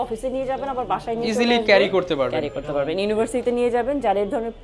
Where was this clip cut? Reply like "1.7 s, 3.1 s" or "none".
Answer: none

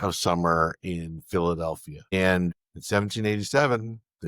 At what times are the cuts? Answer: 2.1 s, 2.7 s

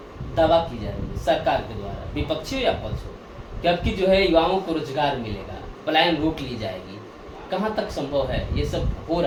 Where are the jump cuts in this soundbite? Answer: none

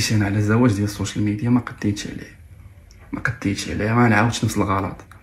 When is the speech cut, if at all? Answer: none

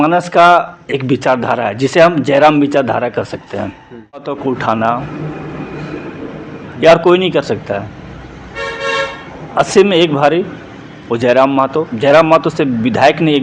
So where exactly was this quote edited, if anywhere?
4.4 s

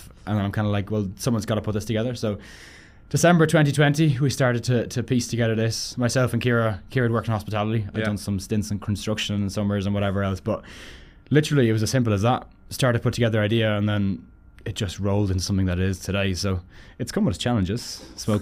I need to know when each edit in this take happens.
none

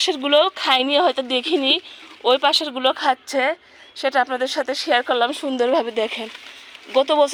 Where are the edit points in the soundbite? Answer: none

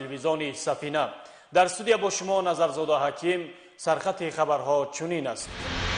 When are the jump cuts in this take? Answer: none

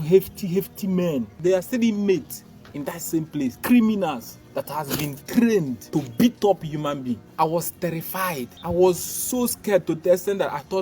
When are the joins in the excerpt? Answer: 1.3 s, 3.6 s, 5.8 s, 7.3 s, 8.5 s

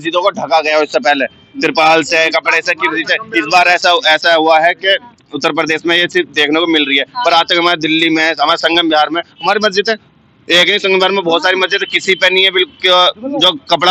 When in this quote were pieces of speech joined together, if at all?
none

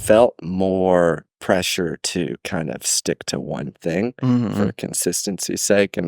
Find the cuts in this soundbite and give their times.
1.3 s

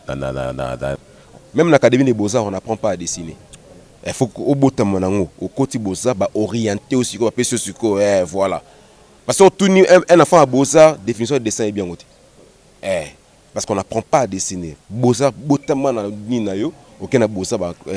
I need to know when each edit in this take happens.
1.0 s

